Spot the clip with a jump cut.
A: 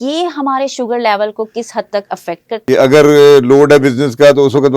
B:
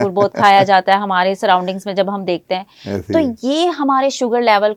A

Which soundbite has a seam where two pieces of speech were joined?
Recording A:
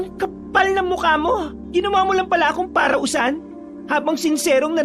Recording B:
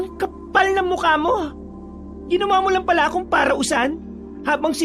A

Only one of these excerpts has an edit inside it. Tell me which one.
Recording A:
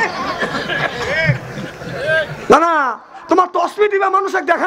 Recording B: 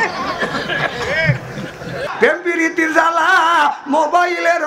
B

